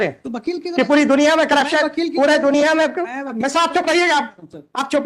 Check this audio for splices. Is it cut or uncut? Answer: uncut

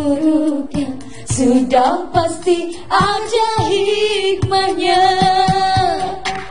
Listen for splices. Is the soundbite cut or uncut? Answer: uncut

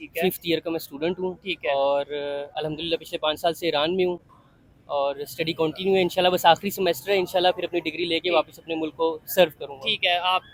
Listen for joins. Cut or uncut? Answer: uncut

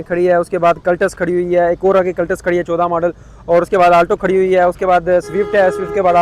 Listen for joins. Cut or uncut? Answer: uncut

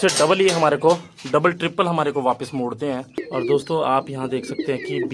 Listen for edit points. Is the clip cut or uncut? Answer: cut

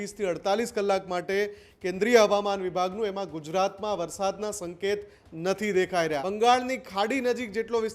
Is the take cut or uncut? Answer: cut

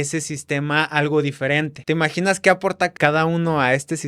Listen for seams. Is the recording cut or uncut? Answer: cut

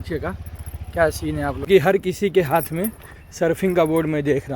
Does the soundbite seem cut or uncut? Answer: cut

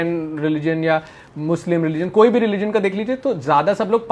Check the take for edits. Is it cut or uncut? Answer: uncut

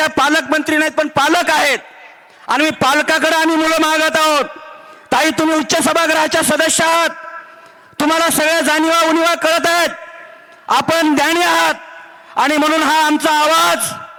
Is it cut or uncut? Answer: uncut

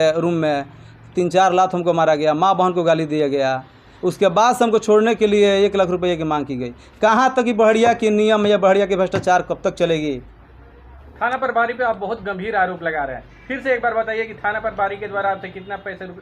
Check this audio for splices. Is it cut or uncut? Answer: uncut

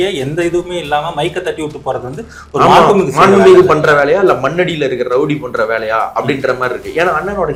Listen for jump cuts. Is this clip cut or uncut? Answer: uncut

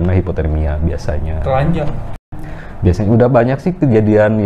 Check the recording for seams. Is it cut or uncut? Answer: cut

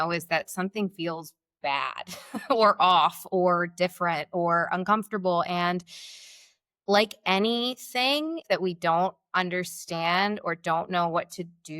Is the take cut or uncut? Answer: cut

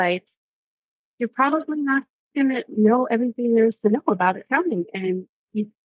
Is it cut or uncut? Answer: uncut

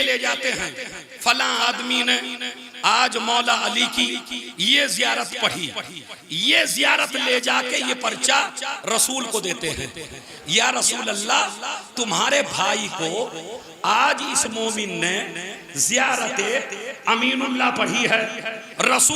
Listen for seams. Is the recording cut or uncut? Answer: uncut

